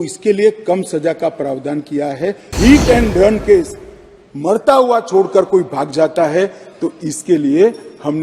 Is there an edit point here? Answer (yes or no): yes